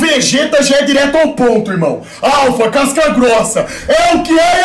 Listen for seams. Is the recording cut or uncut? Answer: uncut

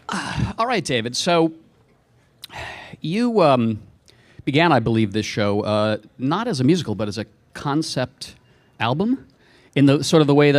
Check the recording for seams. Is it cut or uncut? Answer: cut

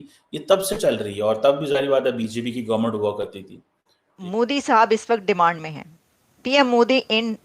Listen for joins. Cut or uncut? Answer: cut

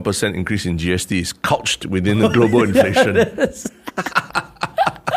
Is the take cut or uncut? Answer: uncut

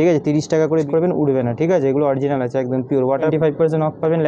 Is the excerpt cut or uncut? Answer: cut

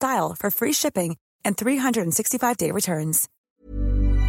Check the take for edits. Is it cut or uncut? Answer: cut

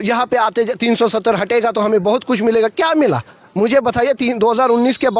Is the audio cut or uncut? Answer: uncut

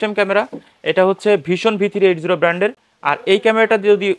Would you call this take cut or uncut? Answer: uncut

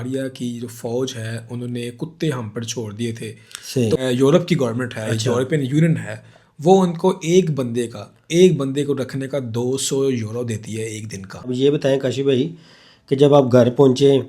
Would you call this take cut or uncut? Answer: cut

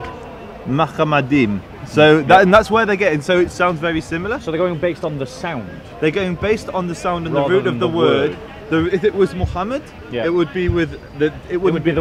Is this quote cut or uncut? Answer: uncut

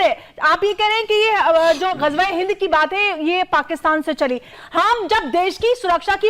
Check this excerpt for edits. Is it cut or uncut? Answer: cut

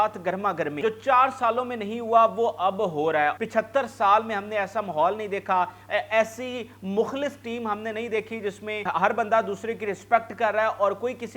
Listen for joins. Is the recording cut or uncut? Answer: cut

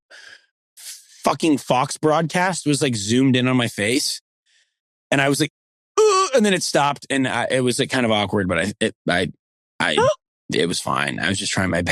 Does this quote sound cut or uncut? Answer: uncut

